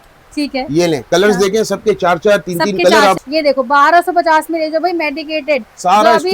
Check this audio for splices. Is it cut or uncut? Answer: cut